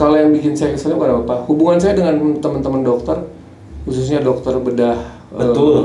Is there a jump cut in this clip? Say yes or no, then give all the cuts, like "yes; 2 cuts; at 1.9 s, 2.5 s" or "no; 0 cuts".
no; 0 cuts